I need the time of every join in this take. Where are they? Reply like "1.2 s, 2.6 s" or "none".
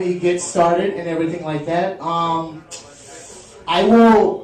2.8 s